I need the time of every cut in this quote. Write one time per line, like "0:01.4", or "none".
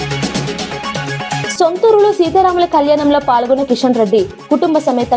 none